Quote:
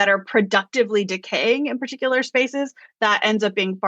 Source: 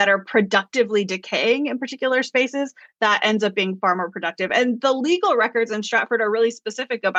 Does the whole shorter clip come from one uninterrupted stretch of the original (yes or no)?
yes